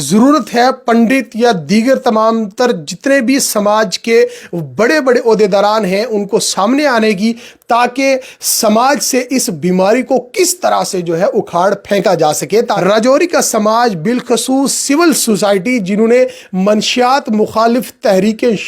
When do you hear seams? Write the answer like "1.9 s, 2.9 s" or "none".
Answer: 12.7 s

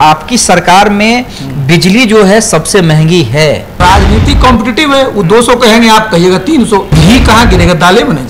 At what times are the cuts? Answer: 3.7 s, 6.9 s

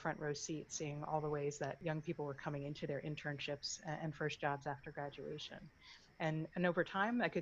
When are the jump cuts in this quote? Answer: 1.8 s

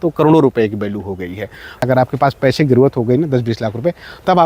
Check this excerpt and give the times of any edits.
1.8 s

